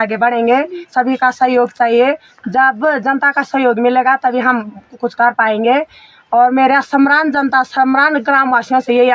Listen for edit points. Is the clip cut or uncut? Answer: uncut